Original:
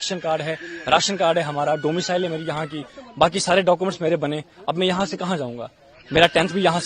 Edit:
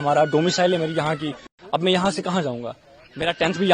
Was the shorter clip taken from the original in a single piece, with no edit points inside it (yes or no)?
no